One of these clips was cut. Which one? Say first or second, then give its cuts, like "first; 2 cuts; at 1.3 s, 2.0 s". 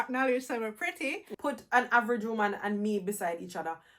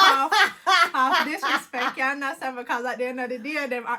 first; 1 cut; at 1.2 s